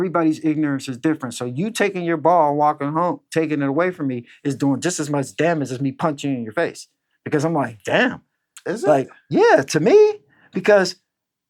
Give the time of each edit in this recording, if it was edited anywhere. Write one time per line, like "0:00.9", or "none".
none